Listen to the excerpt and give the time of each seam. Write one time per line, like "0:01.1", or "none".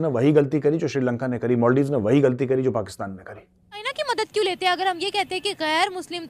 0:03.9